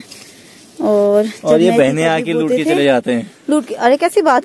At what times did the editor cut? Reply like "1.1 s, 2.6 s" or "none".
3.3 s